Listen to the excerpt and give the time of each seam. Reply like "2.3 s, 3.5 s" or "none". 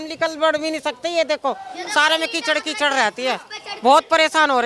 none